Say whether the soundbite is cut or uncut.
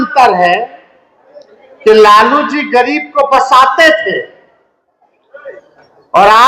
uncut